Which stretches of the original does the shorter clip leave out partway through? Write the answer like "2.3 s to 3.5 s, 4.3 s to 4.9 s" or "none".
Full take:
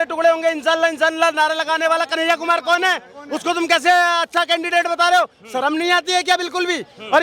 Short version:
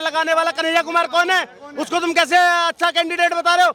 none